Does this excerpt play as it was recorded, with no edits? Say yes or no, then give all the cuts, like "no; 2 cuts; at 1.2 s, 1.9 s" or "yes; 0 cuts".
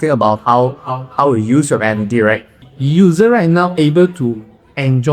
no; 1 cut; at 2.6 s